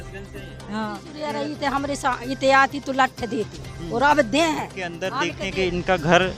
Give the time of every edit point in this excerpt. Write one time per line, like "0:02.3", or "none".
0:01.1
0:05.0